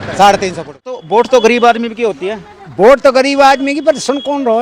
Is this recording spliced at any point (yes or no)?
yes